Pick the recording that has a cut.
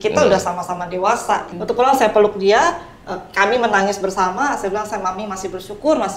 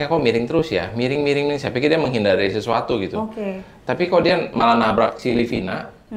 first; 1 cut; at 1.5 s

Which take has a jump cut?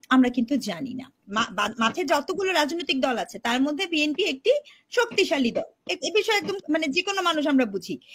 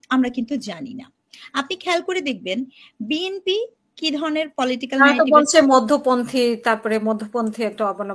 first; 1 cut; at 1.2 s

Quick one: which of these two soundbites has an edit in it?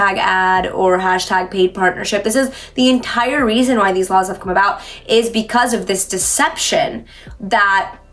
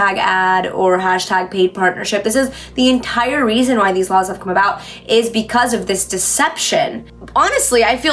second; 1 cut; at 7.1 s

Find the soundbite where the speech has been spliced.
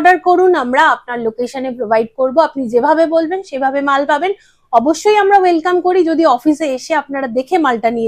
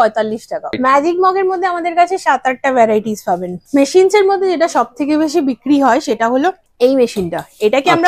second; 3 cuts; at 0.8 s, 3.5 s, 6.7 s

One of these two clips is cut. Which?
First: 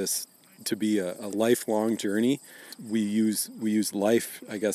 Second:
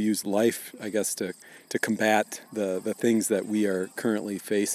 first; 1 cut; at 2.8 s

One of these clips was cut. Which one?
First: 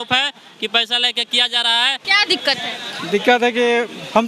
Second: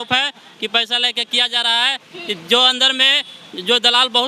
first; 1 cut; at 2.0 s

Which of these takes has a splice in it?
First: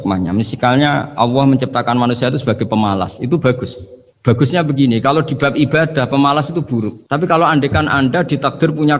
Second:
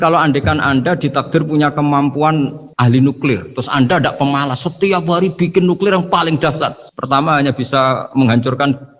second; 1 cut; at 2.6 s

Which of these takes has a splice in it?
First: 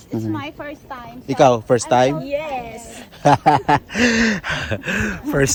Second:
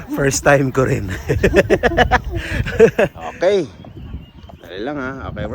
second; 1 cut; at 3.2 s

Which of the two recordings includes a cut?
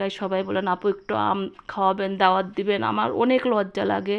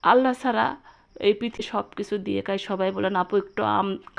second; 1 cut; at 1.6 s

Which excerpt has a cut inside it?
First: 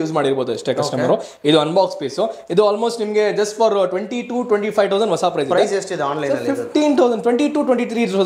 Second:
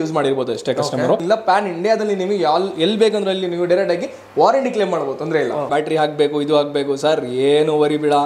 second; 2 cuts; at 1.2 s, 5.7 s

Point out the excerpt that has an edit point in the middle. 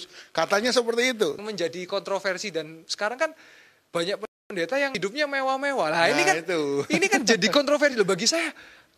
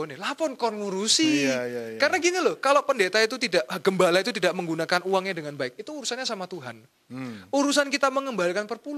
first; 2 cuts; at 1.4 s, 5.0 s

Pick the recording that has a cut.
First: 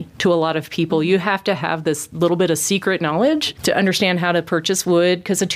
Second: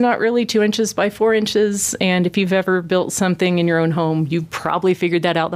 first; 1 cut; at 3.5 s

